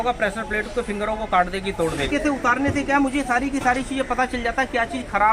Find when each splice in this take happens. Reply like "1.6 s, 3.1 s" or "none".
2.1 s

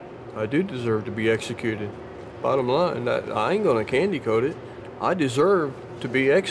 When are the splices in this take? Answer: none

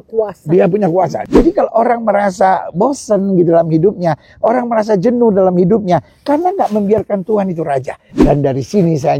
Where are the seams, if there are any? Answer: 1.2 s, 8.0 s

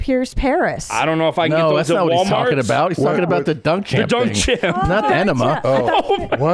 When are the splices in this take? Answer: 5.1 s

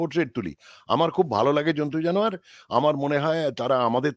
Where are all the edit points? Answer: none

